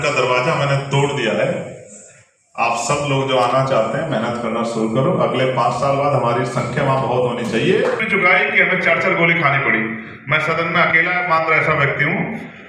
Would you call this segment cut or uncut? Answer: cut